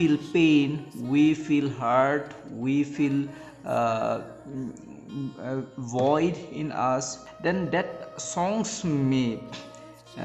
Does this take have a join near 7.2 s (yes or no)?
yes